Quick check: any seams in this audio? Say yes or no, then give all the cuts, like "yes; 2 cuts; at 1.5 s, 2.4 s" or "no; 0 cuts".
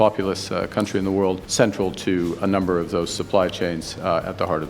yes; 1 cut; at 1.5 s